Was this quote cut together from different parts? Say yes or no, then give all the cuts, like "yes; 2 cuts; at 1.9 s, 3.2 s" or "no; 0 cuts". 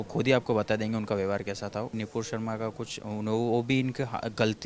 yes; 1 cut; at 2.0 s